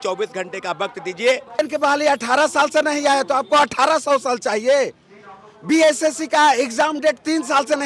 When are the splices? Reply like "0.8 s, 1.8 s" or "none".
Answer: 1.6 s